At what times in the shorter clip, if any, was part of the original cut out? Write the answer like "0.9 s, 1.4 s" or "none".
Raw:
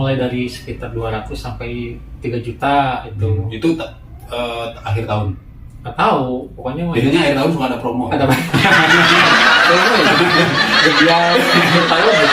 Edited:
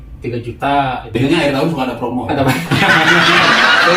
1.1 s